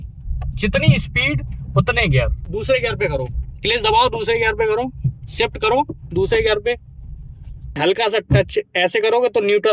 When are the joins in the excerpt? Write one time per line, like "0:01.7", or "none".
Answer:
0:02.4
0:07.8